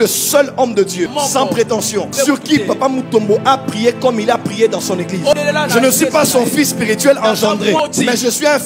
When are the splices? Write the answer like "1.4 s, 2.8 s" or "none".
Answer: 1.1 s, 2.1 s, 5.3 s, 7.8 s